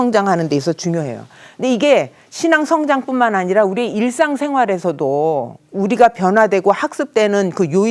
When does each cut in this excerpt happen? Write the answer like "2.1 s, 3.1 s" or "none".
none